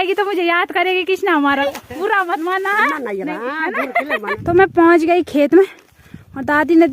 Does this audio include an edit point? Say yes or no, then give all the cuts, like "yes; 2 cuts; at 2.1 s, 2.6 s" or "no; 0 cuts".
yes; 2 cuts; at 1.6 s, 4.3 s